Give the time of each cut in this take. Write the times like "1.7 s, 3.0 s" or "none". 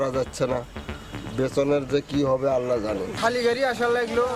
none